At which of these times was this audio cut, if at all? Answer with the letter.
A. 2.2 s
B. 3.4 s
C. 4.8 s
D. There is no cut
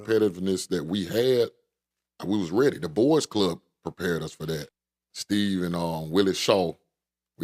C